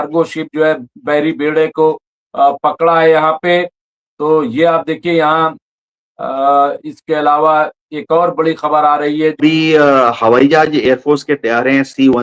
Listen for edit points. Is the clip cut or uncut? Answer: cut